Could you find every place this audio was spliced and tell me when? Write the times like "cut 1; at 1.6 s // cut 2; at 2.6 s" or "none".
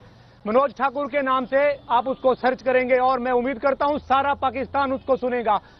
cut 1; at 1.3 s